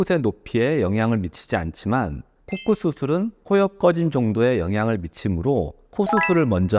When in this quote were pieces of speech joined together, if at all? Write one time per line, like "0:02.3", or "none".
none

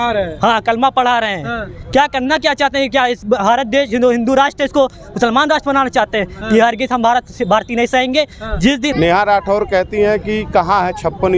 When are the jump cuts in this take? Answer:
0:08.9

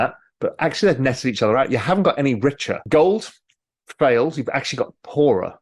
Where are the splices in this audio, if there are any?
0:02.8

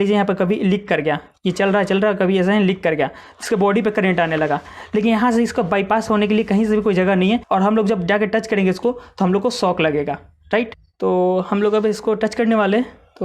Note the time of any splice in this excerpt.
0:07.4
0:10.8

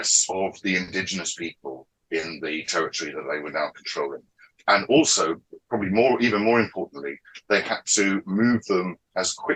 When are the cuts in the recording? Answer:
none

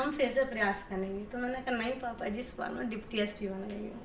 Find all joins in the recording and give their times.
none

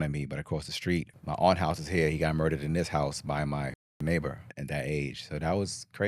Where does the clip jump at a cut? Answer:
0:01.1
0:04.5

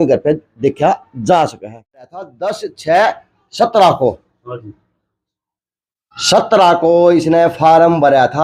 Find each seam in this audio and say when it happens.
0:02.2

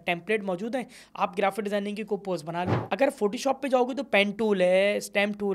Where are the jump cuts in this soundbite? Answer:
0:02.8

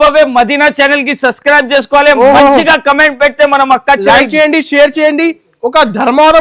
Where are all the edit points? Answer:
none

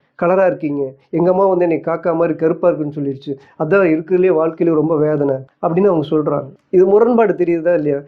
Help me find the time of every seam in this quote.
0:05.5
0:06.5

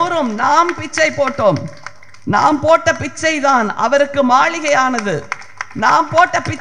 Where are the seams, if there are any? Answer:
none

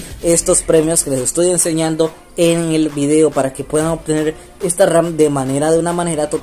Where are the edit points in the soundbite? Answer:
none

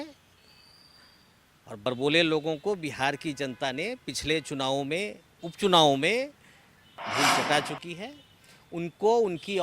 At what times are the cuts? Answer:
0:01.9

